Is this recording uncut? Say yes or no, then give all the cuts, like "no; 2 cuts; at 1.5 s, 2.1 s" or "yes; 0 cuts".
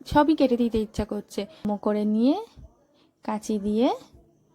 no; 1 cut; at 1.7 s